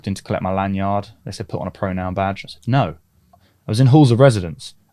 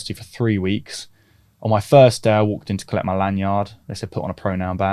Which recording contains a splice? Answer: first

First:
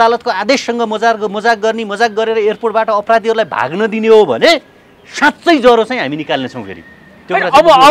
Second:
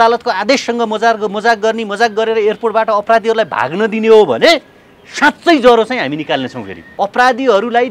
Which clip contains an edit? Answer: second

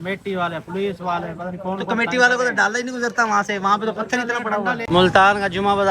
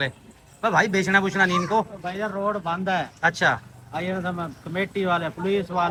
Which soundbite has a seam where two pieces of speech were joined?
first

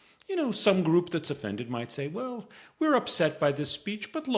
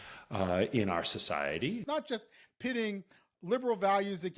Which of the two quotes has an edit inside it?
second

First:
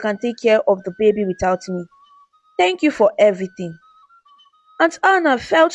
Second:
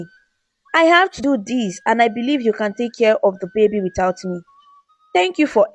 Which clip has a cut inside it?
second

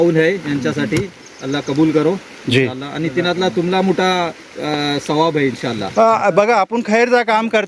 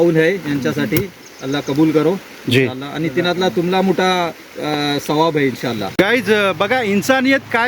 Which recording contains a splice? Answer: second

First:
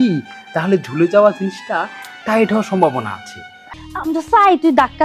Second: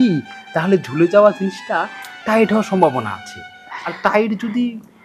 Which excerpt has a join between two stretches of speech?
first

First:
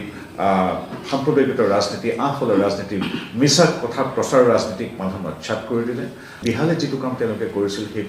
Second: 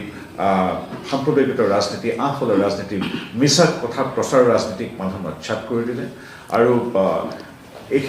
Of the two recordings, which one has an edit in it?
first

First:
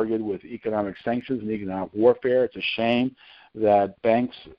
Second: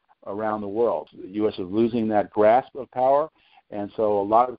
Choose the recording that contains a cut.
second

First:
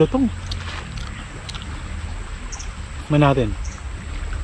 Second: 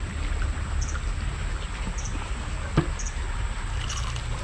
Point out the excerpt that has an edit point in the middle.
first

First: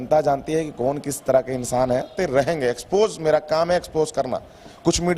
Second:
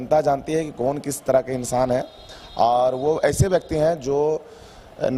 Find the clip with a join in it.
first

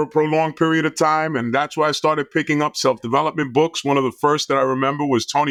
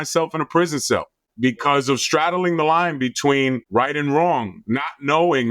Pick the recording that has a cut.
second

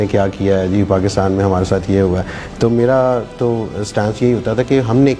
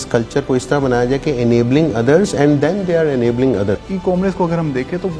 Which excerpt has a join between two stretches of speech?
second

